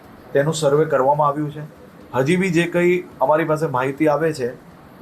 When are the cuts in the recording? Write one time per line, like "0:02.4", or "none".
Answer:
none